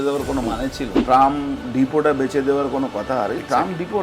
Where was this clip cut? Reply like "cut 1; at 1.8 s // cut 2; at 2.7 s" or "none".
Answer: cut 1; at 0.9 s